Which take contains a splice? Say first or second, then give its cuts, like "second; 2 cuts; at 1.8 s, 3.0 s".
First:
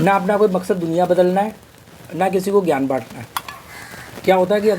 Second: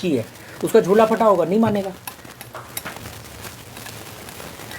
second; 1 cut; at 3.0 s